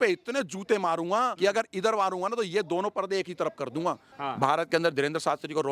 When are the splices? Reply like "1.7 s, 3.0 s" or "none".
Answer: 1.3 s, 4.1 s